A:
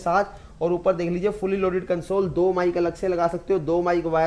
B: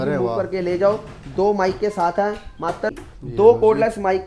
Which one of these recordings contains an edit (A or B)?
B